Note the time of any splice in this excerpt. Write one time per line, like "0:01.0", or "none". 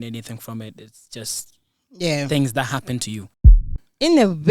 0:03.6